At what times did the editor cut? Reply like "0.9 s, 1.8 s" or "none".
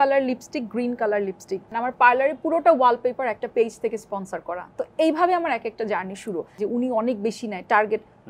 1.7 s, 6.5 s